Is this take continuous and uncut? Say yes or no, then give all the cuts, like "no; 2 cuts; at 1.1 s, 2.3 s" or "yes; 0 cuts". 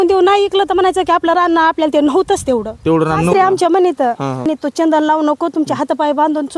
no; 2 cuts; at 3.3 s, 4.5 s